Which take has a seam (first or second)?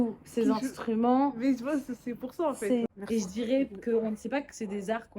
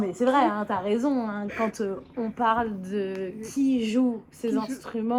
first